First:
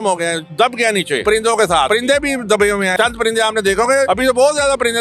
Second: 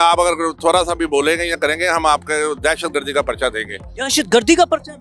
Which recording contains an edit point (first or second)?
first